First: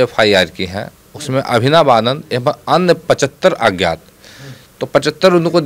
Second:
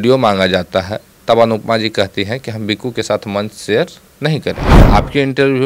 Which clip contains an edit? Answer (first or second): second